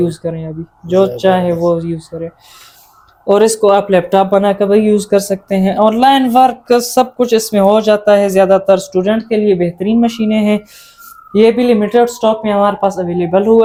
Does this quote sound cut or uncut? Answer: uncut